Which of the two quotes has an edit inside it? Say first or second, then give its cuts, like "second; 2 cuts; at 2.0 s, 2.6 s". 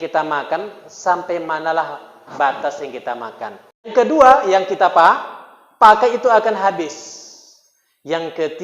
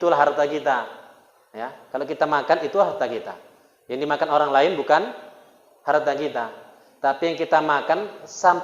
first; 1 cut; at 3.9 s